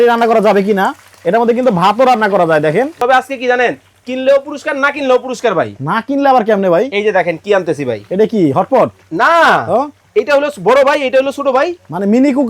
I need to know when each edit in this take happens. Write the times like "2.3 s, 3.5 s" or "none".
3.0 s